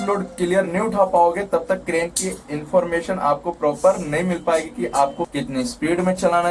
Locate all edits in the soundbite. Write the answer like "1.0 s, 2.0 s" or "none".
5.2 s

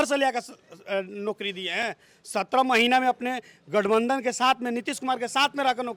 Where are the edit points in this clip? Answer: none

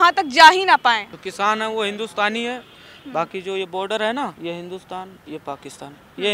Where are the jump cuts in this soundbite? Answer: 1.2 s, 4.4 s

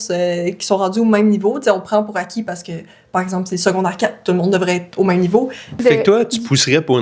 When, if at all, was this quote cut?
5.8 s

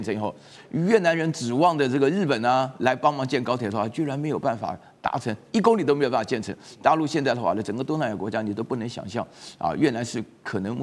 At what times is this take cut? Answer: none

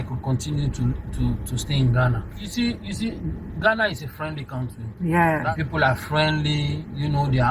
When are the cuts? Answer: 2.5 s, 5.4 s

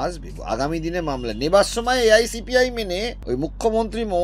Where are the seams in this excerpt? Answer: 3.1 s

